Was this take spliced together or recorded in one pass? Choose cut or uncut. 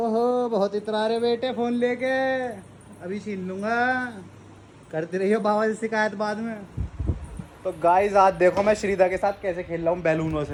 uncut